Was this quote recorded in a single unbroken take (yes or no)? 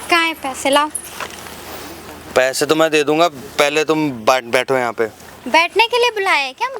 yes